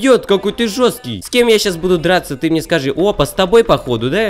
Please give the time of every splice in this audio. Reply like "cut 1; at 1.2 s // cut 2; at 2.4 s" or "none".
cut 1; at 1.2 s